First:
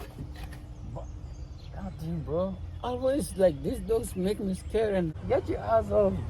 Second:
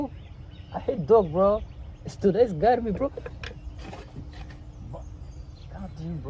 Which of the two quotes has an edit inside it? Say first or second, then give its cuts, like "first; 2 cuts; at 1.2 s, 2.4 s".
first; 1 cut; at 5.1 s